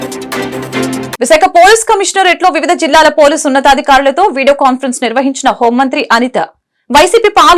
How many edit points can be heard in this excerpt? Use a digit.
1